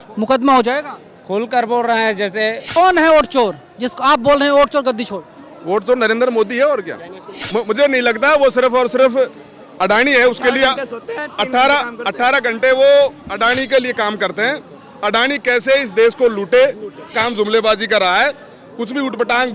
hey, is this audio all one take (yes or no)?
no